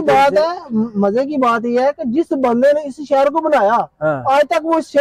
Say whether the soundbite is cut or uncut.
uncut